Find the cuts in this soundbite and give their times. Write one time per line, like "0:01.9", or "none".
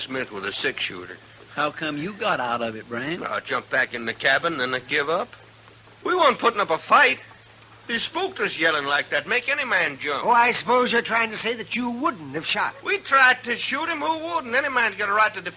none